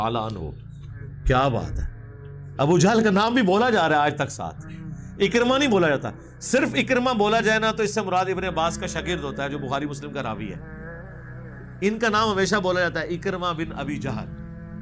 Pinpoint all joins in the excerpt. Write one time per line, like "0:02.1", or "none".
0:10.6
0:11.8
0:14.1